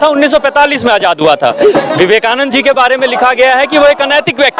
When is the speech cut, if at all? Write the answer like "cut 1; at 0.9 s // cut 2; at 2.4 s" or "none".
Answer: none